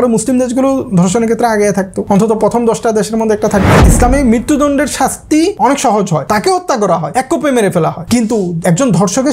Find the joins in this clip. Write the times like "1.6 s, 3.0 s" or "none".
2.0 s, 3.8 s, 5.6 s, 6.2 s, 7.1 s, 8.5 s